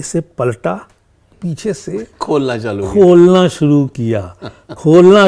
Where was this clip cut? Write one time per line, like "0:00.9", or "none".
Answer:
0:01.3